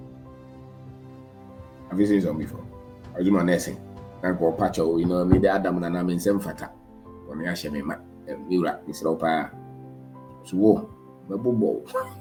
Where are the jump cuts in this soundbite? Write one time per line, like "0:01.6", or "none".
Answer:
none